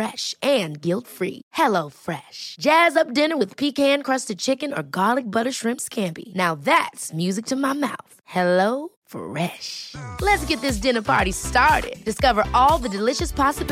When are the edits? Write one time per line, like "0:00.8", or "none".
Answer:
none